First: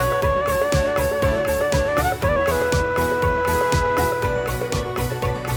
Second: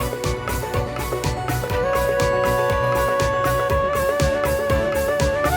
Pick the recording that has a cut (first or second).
second